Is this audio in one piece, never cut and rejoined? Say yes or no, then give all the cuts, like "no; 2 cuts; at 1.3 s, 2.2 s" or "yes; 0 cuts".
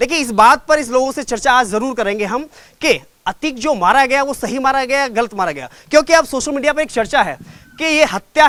yes; 0 cuts